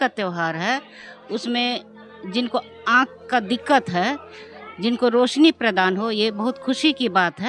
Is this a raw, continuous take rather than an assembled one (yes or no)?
yes